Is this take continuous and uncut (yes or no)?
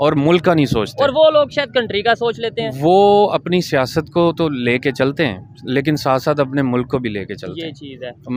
yes